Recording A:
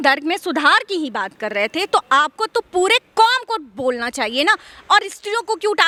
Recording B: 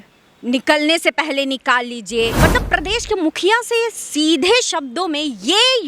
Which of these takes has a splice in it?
B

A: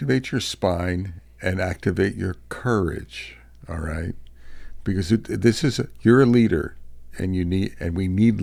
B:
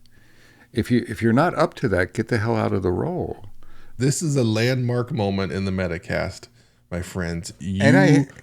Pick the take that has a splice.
B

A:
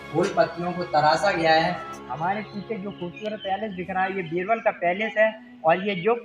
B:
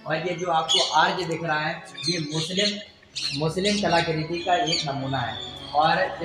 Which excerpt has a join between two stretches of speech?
A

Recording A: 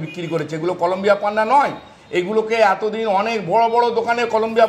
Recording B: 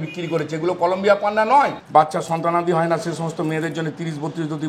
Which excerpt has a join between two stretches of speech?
B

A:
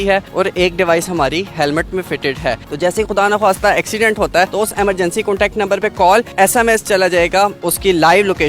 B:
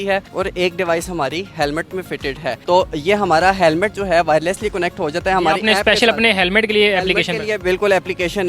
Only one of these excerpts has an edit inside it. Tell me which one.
A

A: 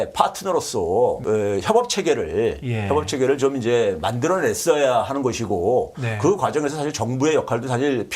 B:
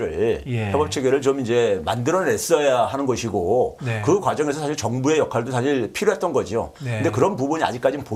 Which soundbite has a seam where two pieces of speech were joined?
A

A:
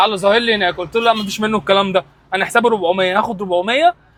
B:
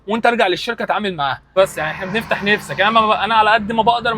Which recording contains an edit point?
B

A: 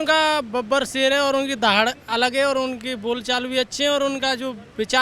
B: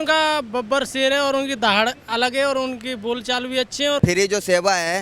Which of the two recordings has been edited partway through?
B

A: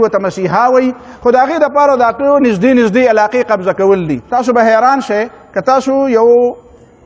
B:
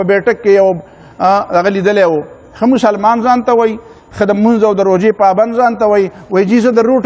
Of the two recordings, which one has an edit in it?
A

